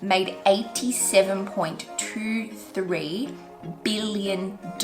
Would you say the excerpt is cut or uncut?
uncut